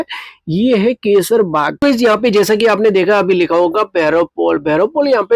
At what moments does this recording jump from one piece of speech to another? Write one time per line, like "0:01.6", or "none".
0:01.8